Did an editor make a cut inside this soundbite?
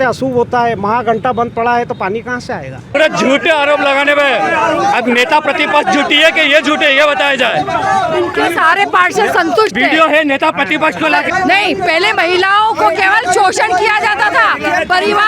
yes; 2 cuts; at 3.0 s, 11.3 s

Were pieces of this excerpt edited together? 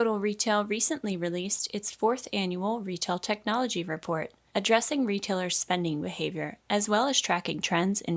no; 0 cuts

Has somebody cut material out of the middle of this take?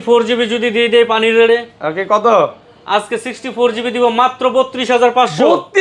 no; 0 cuts

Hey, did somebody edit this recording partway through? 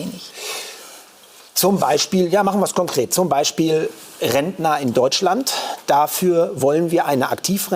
no; 0 cuts

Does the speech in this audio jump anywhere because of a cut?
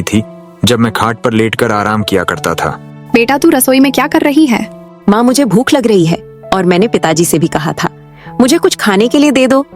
yes; 1 cut; at 2.9 s

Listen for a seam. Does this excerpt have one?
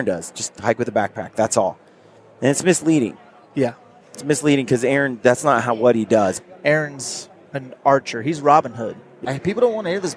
yes; 2 cuts; at 6.4 s, 9.1 s

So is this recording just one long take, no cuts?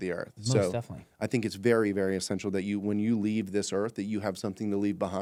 yes; 0 cuts

